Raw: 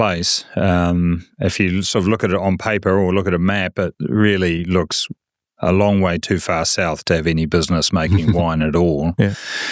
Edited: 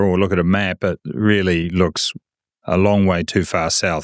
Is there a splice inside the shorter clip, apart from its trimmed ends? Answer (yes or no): no